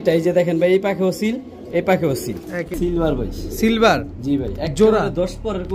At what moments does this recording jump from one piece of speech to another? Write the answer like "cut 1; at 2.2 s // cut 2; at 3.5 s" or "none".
cut 1; at 2.8 s